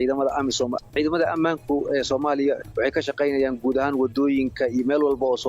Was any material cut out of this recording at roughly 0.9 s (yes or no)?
yes